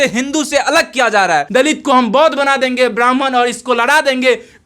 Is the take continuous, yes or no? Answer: no